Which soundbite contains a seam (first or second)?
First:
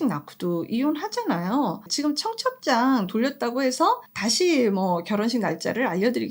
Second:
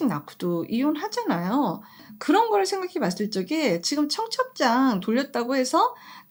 first